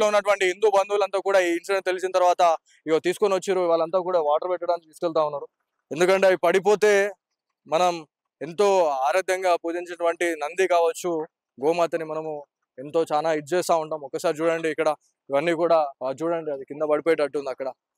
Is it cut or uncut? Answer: uncut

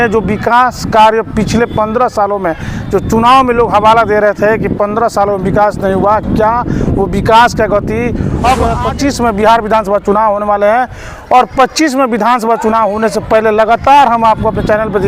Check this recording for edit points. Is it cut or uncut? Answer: cut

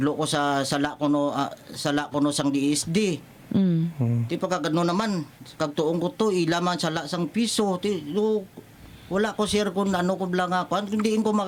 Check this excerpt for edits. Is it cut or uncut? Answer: uncut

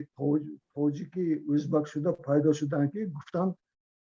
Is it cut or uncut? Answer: uncut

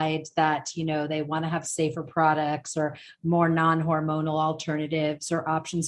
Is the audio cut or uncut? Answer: uncut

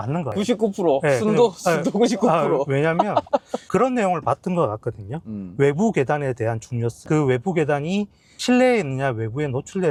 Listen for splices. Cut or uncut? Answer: uncut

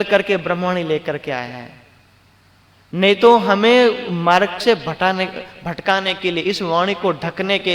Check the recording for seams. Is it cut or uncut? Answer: uncut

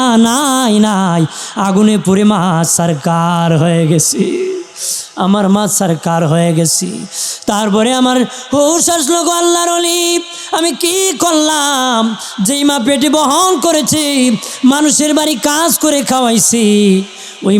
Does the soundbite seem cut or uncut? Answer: uncut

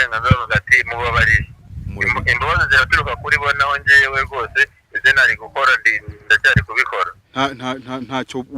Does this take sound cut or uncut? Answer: cut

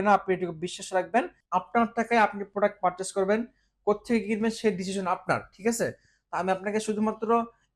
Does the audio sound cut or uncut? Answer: cut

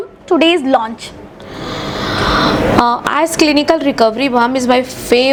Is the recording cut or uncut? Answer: uncut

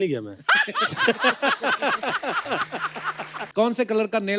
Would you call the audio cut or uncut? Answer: cut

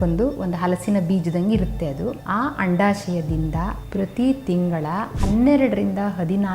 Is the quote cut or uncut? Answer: cut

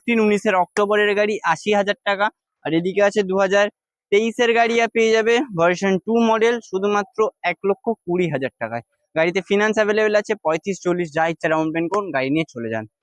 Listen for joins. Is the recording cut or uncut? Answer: uncut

